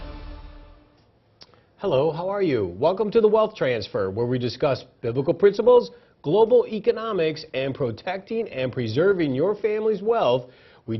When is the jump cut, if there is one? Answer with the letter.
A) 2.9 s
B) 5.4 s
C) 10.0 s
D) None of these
C